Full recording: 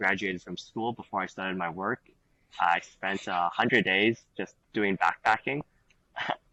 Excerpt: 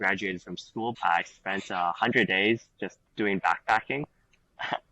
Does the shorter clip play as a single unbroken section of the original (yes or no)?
no